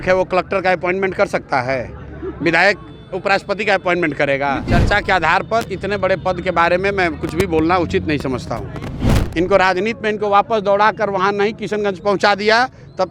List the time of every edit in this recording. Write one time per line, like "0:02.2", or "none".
0:04.7
0:09.0